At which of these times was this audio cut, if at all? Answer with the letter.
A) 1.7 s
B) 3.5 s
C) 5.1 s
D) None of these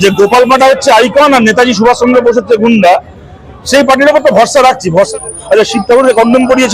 C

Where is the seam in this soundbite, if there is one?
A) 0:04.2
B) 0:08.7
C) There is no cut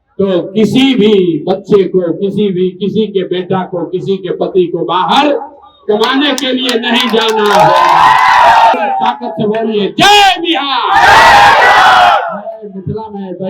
B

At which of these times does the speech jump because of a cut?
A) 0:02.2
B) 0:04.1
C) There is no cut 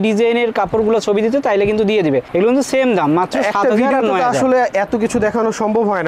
C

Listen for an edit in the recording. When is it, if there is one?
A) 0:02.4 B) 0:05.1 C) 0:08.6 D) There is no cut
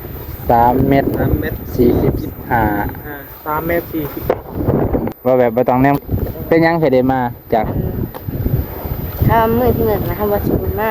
B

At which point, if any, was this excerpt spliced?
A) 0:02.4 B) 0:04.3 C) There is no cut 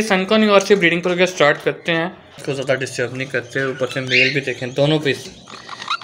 A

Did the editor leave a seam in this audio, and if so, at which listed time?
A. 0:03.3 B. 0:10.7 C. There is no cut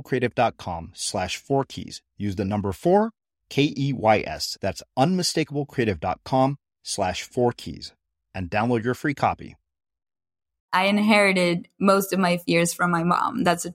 B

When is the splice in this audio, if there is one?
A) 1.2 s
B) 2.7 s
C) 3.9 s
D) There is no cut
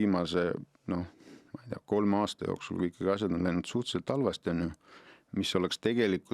D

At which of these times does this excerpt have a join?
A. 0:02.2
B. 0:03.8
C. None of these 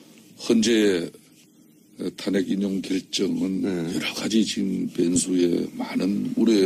A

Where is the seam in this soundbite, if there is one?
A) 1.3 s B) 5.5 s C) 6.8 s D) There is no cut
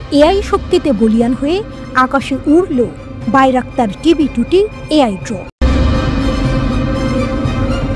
B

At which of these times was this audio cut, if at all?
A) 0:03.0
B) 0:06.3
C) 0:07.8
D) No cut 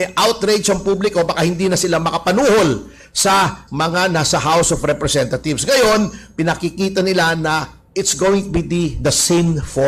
D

